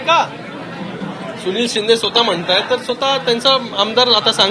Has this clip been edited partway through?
no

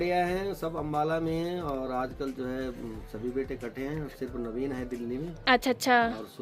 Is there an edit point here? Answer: no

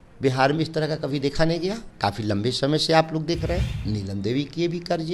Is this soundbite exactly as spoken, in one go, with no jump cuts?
no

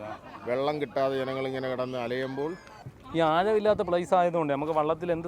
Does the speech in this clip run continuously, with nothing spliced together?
no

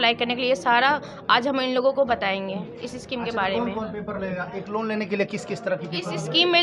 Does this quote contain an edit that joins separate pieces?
no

